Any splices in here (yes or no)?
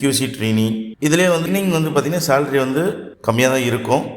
yes